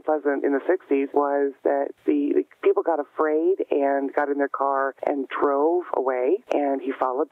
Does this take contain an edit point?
yes; 4 cuts; at 1.1 s, 1.9 s, 4.9 s, 6.4 s

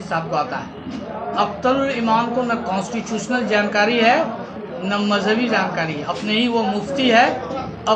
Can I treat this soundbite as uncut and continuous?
yes; 0 cuts

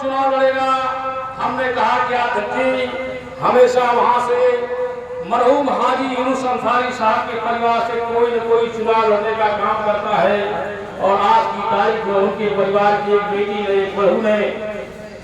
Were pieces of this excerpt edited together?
yes; 1 cut; at 13.2 s

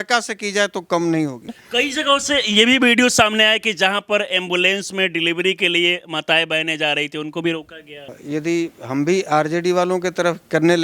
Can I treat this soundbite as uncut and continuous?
no; 2 cuts; at 1.6 s, 8.2 s

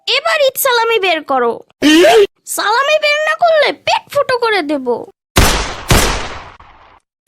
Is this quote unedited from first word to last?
no; 1 cut; at 5.1 s

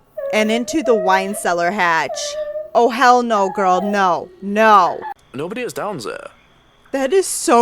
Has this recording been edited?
yes; 1 cut; at 5.1 s

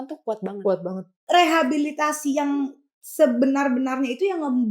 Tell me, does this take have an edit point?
yes; 1 cut; at 1.1 s

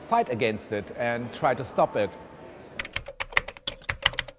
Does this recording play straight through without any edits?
no; 1 cut; at 2.7 s

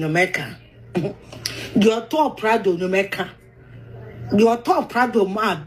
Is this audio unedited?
yes; 0 cuts

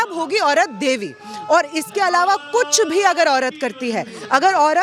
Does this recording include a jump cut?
no; 0 cuts

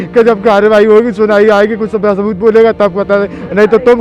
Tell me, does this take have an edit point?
no; 0 cuts

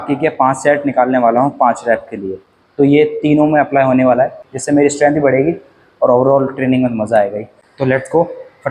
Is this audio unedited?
yes; 0 cuts

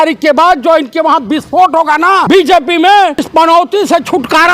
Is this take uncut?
no; 2 cuts; at 2.2 s, 3.3 s

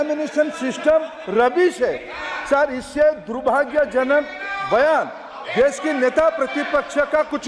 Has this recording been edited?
no; 0 cuts

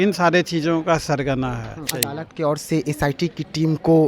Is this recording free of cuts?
no; 1 cut; at 1.9 s

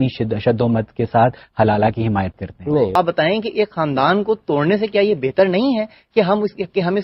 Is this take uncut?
no; 1 cut; at 2.9 s

